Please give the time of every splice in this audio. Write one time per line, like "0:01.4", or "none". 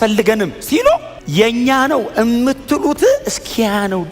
0:01.2